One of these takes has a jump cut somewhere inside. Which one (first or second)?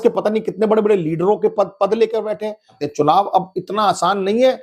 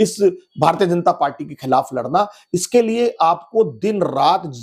first